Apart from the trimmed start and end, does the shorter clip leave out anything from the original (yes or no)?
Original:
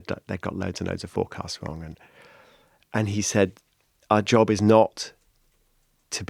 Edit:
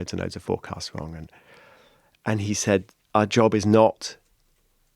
yes